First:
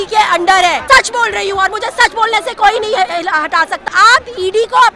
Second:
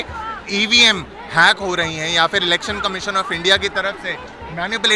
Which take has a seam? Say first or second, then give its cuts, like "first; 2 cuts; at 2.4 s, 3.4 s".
first; 2 cuts; at 0.8 s, 3.8 s